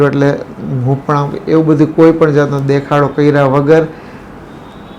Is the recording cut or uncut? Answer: uncut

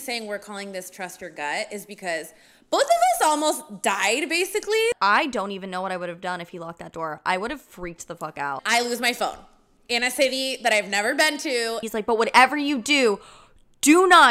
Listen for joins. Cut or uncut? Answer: cut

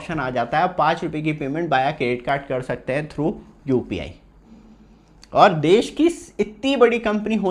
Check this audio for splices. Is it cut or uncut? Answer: uncut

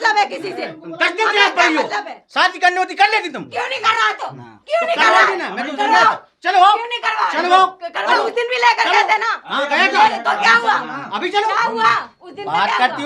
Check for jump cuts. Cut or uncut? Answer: uncut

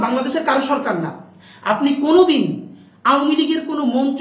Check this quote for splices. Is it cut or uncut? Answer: uncut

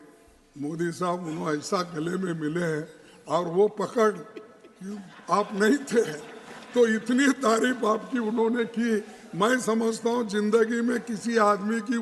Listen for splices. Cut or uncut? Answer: uncut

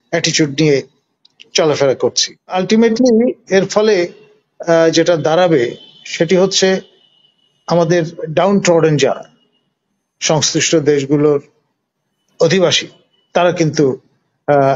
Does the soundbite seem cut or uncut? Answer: cut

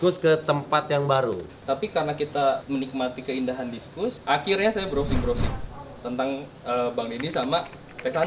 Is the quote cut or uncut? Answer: cut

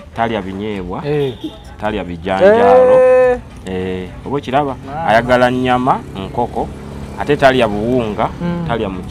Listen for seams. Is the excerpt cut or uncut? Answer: uncut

